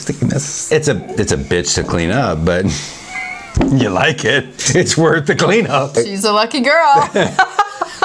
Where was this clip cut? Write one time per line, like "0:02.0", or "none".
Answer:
0:00.7
0:06.0